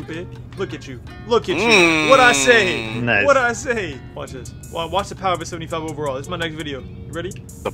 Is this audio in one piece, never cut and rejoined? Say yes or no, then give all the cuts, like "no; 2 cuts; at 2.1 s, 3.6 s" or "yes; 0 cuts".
yes; 0 cuts